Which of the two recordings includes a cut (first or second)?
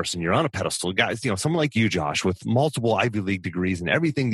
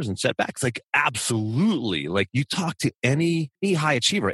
second